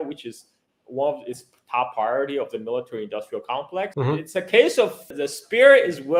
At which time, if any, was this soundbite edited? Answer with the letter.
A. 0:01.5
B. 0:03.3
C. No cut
C